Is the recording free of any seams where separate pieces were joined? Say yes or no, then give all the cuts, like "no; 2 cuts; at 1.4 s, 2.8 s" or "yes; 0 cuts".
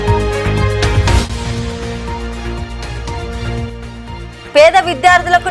no; 1 cut; at 0.9 s